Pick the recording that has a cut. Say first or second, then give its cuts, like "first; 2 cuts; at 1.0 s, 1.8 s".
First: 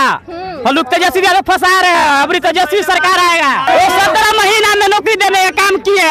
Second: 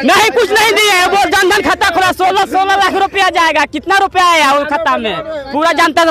first; 1 cut; at 3.7 s